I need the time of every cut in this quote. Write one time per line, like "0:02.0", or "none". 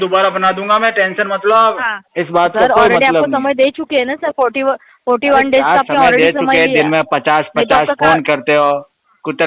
0:02.0